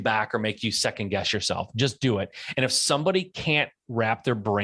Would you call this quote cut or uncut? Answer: uncut